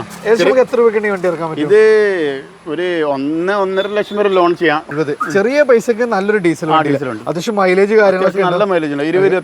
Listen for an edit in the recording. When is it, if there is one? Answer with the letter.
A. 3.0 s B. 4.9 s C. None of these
B